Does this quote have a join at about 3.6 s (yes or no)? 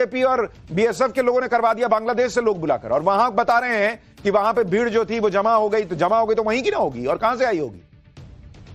no